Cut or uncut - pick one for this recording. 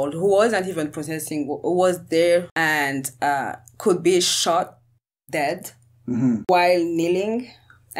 cut